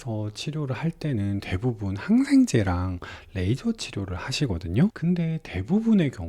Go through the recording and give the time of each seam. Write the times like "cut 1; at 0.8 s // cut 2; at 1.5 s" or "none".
cut 1; at 5.0 s